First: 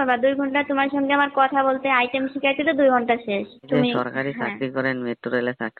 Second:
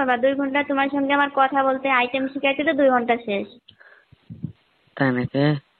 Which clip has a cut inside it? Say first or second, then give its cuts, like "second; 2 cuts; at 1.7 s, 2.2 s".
first; 1 cut; at 3.7 s